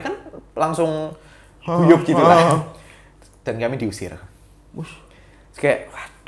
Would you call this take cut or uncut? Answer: uncut